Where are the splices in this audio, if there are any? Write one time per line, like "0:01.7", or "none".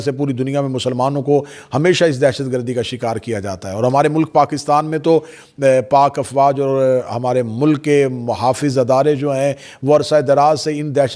none